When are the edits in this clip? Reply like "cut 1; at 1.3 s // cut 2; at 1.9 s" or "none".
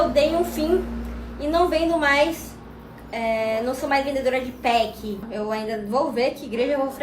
cut 1; at 5.3 s